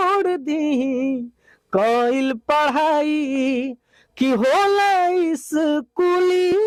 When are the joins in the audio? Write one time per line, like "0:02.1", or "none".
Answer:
none

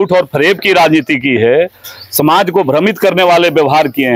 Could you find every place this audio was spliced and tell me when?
none

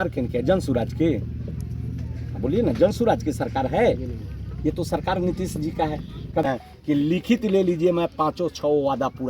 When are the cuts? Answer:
0:06.4

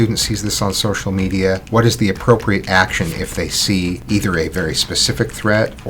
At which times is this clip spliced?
0:01.6
0:04.0

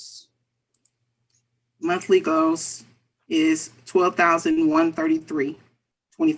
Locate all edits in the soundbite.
none

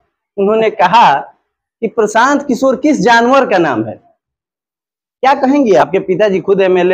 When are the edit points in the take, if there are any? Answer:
0:05.9

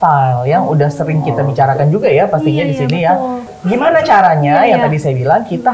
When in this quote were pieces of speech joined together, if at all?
0:03.5

